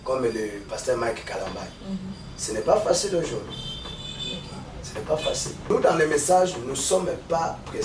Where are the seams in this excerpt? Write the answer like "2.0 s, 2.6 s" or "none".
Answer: 5.7 s

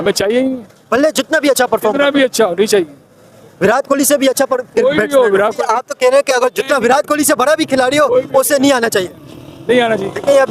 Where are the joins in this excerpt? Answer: 5.6 s

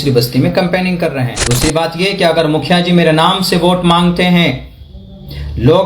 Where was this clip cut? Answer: 1.4 s

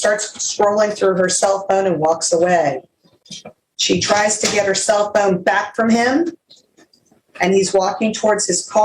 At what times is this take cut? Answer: none

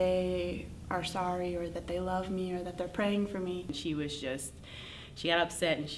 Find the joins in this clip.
3.8 s

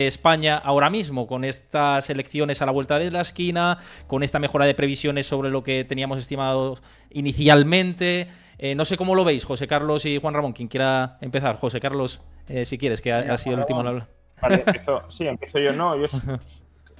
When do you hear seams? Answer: none

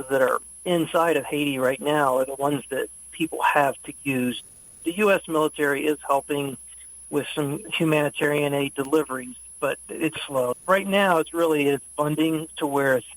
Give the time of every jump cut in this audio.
4.4 s, 7.6 s, 10.6 s

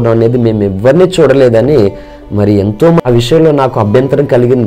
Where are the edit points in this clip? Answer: 3.0 s

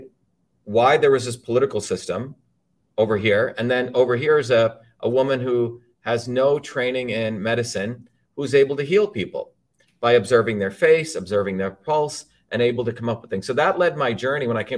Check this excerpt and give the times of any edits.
none

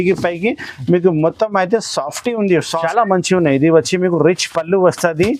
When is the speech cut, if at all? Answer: 2.7 s

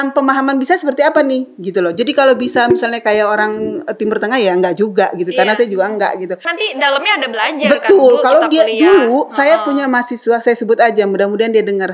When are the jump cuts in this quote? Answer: 6.4 s

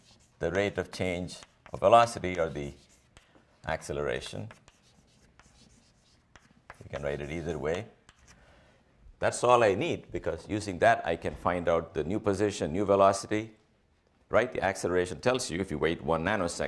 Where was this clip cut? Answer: 7.5 s

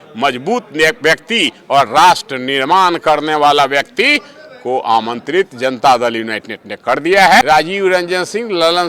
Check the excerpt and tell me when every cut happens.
7.4 s

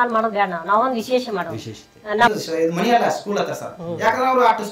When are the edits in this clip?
2.3 s

